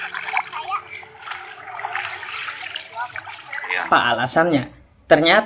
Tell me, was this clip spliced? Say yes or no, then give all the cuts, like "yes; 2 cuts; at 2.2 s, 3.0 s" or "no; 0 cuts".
yes; 1 cut; at 3.9 s